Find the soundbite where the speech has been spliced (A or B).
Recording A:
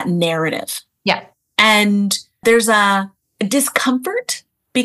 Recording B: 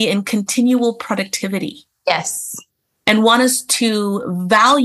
A